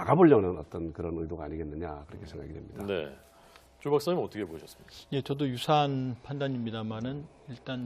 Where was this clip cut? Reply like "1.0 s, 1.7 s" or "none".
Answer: 2.1 s